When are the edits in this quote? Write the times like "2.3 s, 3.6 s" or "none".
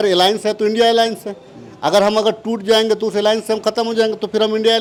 none